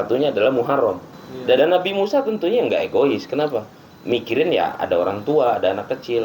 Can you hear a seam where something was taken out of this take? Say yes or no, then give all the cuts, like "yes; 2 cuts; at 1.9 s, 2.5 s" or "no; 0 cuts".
yes; 1 cut; at 1.6 s